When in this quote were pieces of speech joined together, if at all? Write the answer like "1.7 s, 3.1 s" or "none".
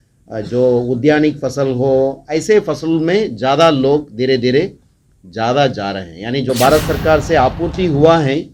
6.5 s